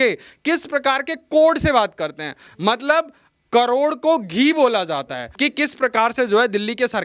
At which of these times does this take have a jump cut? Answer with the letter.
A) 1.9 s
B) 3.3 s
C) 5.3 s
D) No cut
C